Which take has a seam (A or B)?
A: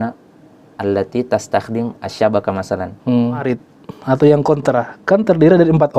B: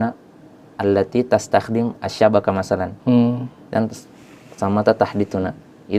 A